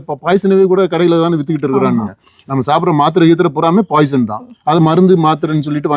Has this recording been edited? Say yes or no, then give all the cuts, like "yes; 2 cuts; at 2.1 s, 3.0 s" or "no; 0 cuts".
no; 0 cuts